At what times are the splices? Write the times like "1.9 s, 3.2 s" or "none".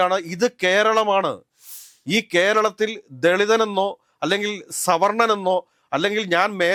none